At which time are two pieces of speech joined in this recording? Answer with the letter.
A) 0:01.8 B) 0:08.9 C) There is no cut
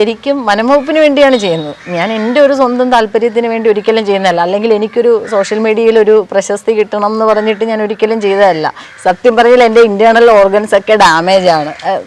B